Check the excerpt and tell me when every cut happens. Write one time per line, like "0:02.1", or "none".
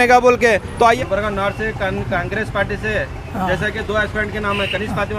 0:01.0

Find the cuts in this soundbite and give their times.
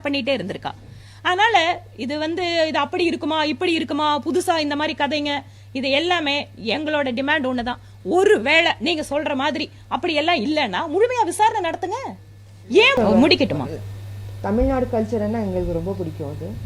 0:12.9

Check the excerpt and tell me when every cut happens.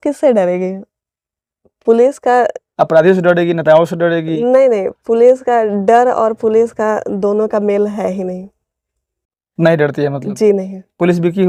none

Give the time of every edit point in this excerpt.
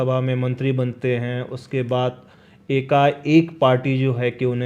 none

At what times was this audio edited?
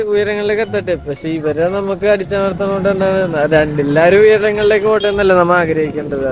none

